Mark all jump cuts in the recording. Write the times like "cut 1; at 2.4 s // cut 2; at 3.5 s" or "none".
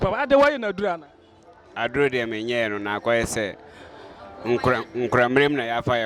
none